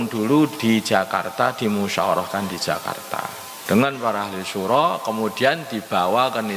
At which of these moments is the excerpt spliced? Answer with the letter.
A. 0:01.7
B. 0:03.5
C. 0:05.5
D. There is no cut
B